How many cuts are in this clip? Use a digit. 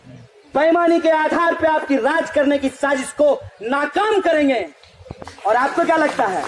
0